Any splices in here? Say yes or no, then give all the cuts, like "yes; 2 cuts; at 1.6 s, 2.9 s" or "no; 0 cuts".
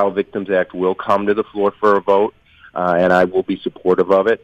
no; 0 cuts